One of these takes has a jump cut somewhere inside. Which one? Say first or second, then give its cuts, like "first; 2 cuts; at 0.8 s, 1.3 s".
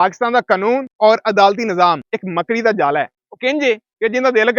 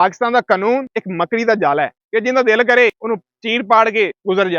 second; 2 cuts; at 0.9 s, 2.0 s